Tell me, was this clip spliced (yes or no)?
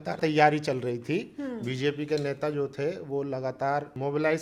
no